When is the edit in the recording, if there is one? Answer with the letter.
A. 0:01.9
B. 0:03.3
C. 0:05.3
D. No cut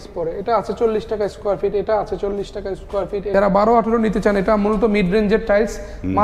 B